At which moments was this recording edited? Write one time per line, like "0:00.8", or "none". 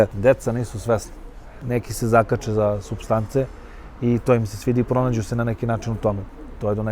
0:01.6